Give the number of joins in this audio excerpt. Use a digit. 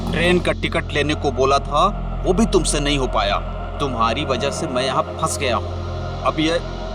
0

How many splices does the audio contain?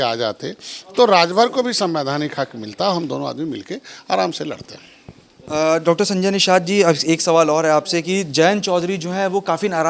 0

